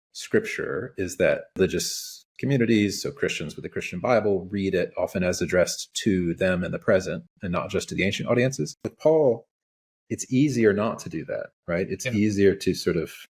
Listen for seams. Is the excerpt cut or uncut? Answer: cut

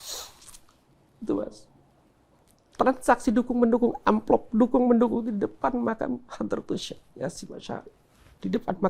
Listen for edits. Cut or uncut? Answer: uncut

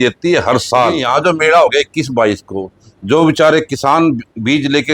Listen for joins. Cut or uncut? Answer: cut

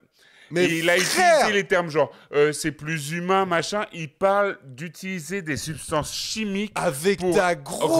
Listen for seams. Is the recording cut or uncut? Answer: uncut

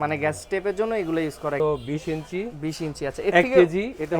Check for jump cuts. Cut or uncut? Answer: cut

